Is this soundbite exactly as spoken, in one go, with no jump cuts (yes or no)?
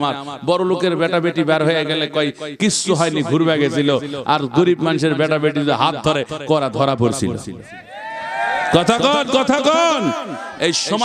yes